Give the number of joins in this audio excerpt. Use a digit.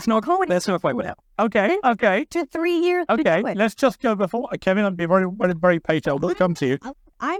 0